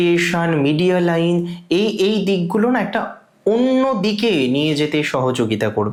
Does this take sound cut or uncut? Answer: uncut